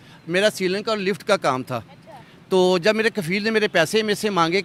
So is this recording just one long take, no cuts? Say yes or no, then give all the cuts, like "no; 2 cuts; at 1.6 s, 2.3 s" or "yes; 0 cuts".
yes; 0 cuts